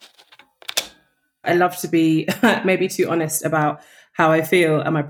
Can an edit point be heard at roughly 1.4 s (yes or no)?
yes